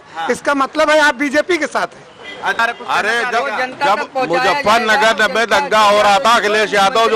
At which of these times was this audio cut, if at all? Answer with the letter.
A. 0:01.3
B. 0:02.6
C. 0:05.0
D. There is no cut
B